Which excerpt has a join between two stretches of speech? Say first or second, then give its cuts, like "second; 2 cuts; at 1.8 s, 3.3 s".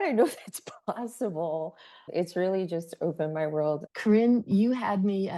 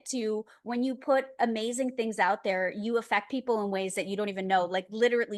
first; 1 cut; at 3.9 s